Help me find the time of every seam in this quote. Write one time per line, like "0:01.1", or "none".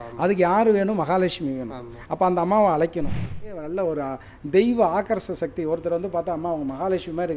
0:03.6